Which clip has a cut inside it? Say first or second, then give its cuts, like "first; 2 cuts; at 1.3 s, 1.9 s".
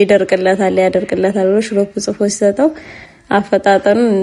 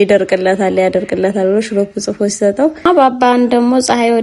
second; 1 cut; at 2.8 s